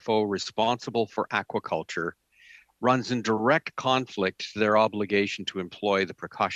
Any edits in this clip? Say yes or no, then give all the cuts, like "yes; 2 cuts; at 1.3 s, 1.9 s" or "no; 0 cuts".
no; 0 cuts